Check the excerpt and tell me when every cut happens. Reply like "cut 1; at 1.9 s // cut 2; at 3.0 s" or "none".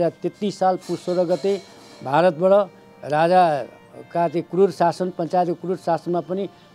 none